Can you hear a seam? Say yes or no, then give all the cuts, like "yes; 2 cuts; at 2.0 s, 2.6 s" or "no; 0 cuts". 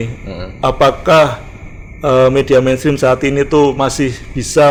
no; 0 cuts